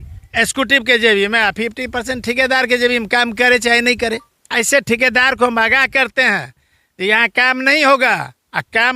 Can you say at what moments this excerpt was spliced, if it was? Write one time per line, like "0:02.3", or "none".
0:04.4